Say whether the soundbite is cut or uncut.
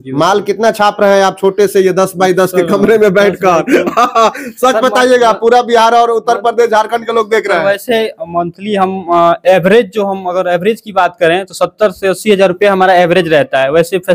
uncut